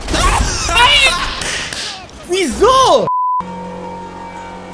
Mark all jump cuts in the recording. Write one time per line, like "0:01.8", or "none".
0:03.3